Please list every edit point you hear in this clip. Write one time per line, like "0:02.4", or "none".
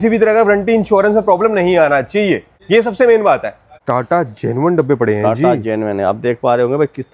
0:02.5
0:03.7